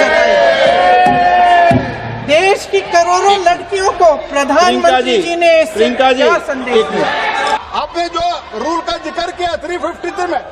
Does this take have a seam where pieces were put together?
yes; 1 cut; at 7.6 s

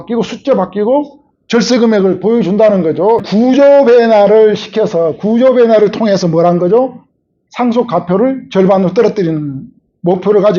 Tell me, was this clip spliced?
yes; 1 cut; at 3.2 s

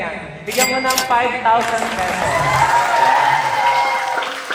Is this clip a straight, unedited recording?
yes; 0 cuts

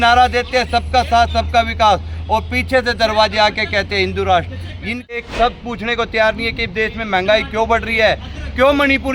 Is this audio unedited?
no; 1 cut; at 5.1 s

